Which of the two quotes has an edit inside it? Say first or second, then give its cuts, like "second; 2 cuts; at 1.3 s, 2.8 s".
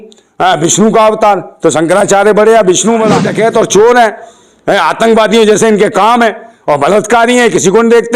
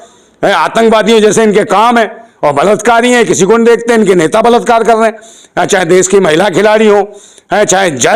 first; 1 cut; at 3.3 s